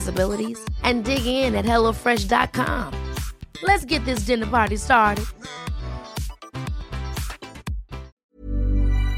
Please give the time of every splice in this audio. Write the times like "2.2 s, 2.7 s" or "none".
8.1 s